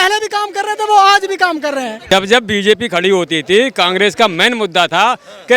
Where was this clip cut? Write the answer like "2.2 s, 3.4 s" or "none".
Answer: 2.0 s